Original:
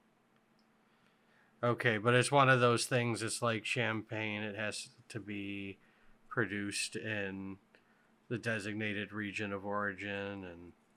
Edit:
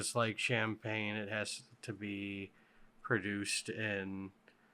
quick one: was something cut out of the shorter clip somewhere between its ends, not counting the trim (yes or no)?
no